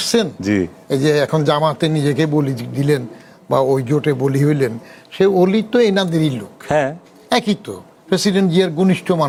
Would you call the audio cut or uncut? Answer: uncut